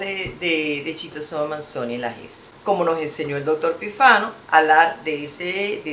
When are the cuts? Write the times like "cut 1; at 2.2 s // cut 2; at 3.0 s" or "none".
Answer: cut 1; at 2.4 s